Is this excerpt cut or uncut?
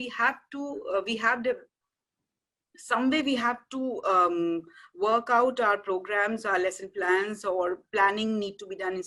uncut